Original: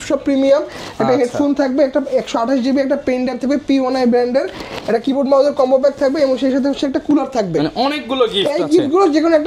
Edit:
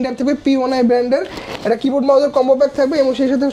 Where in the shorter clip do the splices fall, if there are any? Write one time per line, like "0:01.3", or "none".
none